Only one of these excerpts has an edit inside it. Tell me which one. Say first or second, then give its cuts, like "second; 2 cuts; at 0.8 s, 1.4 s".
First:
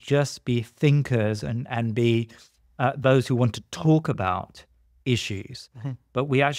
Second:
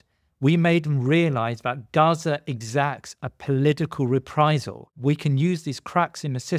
second; 1 cut; at 4.8 s